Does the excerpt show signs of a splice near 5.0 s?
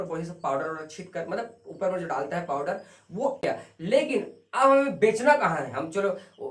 no; 1 cut; at 3.4 s

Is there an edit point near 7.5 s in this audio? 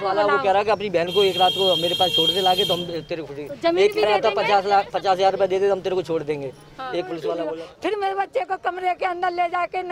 yes; 1 cut; at 7.5 s

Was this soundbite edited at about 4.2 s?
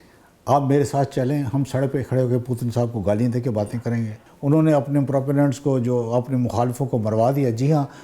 yes; 1 cut; at 4.2 s

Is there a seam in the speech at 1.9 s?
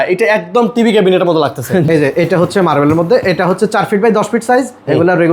yes; 1 cut; at 1.9 s

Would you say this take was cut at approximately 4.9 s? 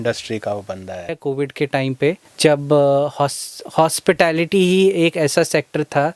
no; 1 cut; at 1.1 s

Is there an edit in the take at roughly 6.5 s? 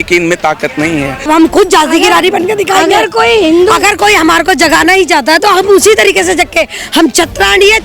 no; 1 cut; at 1.3 s

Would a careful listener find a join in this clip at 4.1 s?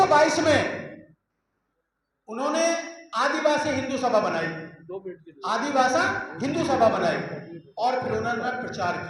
no; 0 cuts

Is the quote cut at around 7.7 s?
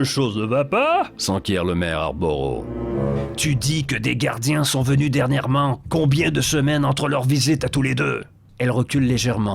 no; 1 cut; at 2.8 s

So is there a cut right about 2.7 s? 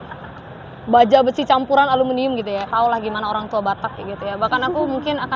yes; 1 cut; at 2.7 s

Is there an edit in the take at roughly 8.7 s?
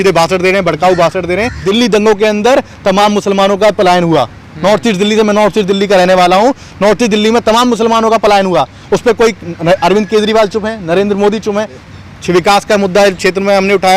no; 2 cuts; at 1.6 s, 11.8 s

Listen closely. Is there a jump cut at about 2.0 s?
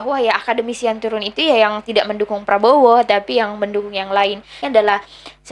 no; 1 cut; at 4.6 s

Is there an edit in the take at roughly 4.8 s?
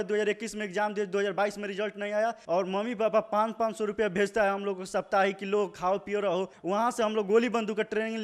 no; 2 cuts; at 2.4 s, 6.5 s

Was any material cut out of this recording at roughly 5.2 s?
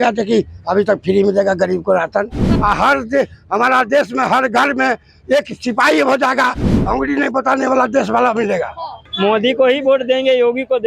no; 2 cuts; at 2.4 s, 9.0 s

